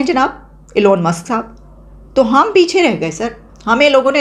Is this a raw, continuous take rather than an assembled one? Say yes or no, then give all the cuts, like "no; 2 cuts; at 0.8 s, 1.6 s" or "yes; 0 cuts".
yes; 0 cuts